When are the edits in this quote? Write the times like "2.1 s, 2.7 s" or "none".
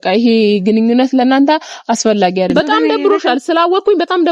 2.5 s